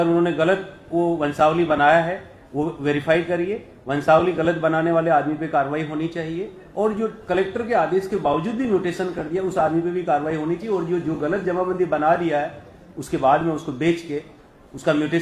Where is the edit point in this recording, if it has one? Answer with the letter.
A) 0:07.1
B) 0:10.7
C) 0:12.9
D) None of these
D